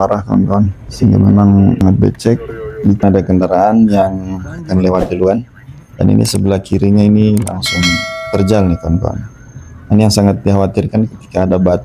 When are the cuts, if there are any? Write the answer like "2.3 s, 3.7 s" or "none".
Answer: 3.0 s